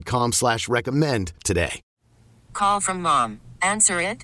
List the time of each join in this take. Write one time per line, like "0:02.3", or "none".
0:01.8